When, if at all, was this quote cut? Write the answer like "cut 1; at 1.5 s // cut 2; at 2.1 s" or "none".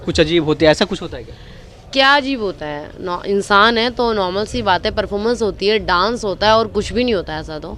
none